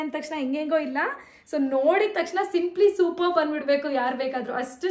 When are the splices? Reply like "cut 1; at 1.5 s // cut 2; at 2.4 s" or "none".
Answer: none